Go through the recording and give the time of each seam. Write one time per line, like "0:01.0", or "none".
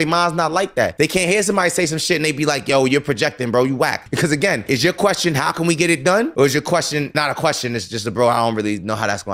0:04.0